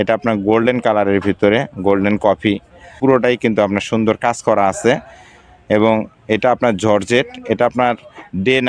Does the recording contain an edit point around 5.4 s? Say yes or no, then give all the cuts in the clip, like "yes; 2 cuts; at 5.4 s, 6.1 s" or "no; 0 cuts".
no; 1 cut; at 2.8 s